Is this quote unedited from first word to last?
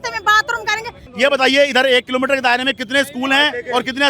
no; 1 cut; at 1.0 s

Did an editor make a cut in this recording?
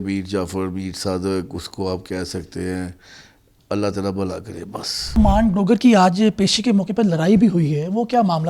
yes; 1 cut; at 5.2 s

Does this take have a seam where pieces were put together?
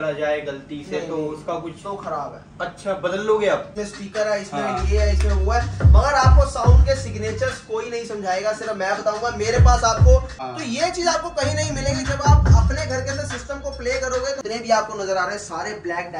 yes; 3 cuts; at 3.7 s, 10.4 s, 14.4 s

